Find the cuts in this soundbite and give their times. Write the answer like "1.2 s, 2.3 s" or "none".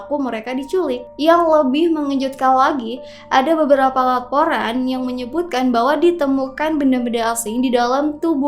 1.1 s